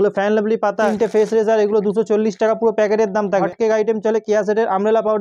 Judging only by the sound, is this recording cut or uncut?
cut